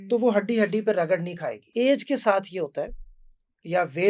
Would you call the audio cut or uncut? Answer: cut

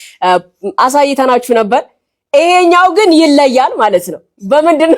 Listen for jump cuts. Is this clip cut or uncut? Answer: uncut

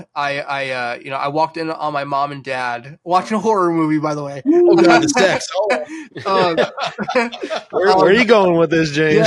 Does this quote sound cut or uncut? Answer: uncut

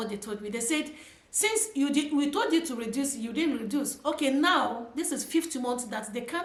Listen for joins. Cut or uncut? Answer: uncut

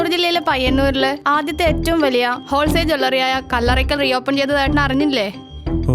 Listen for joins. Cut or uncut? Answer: uncut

